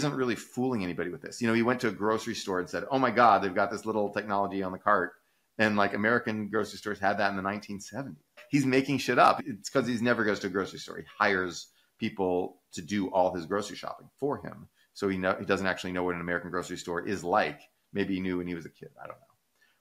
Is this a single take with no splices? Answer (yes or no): yes